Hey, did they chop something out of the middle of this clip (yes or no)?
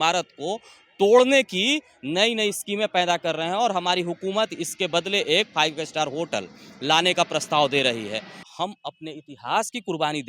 yes